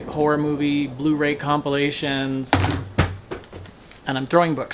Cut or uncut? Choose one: uncut